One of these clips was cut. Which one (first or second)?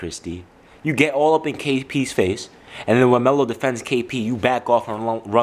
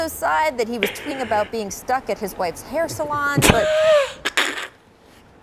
second